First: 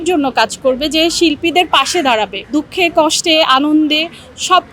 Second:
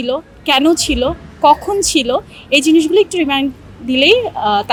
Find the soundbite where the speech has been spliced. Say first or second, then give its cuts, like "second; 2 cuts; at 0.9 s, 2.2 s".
first; 1 cut; at 2.4 s